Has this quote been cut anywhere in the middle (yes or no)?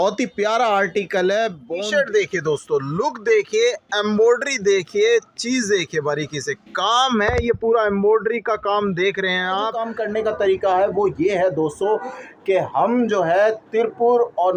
yes